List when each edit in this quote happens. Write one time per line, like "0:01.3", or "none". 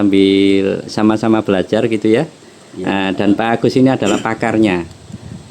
none